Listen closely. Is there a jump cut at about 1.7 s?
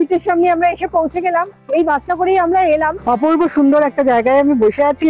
no; 1 cut; at 3.0 s

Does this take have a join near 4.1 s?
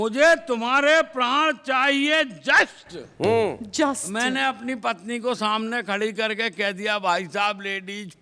no; 0 cuts

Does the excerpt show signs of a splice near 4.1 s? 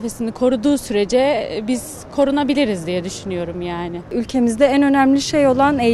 yes; 1 cut; at 4.1 s

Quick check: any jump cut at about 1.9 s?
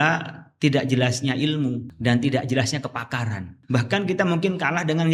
yes; 2 cuts; at 1.9 s, 3.5 s

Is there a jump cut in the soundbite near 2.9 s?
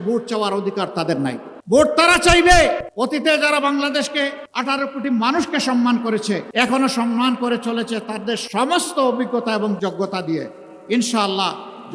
yes; 4 cuts; at 1.5 s, 2.9 s, 4.5 s, 6.5 s

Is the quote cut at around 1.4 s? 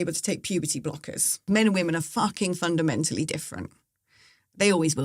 yes; 1 cut; at 1.4 s

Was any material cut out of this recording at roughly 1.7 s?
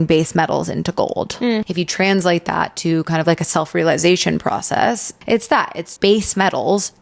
yes; 2 cuts; at 1.7 s, 5.3 s

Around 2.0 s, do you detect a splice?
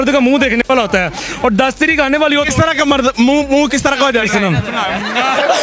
no; 0 cuts

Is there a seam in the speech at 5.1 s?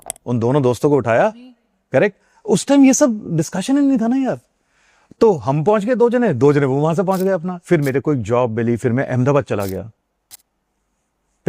no; 1 cut; at 7.5 s

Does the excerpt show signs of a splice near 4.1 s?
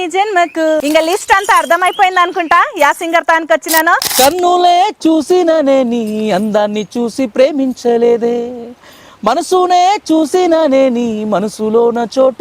yes; 2 cuts; at 0.8 s, 4.1 s

